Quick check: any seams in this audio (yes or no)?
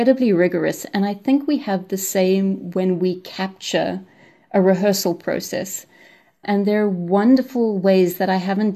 no